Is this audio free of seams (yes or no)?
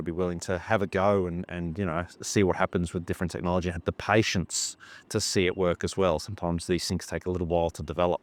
yes